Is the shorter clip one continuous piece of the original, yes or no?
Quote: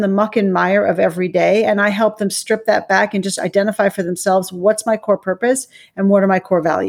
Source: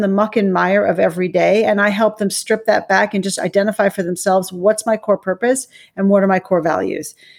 yes